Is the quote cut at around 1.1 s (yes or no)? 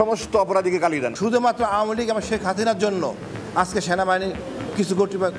yes